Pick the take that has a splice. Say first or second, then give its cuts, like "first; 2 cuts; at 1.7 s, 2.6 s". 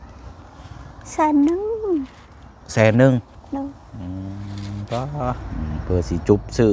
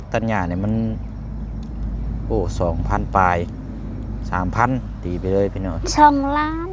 first; 1 cut; at 5.4 s